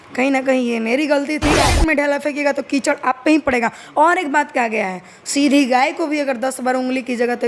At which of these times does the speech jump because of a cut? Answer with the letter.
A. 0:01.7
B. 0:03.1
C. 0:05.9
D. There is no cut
A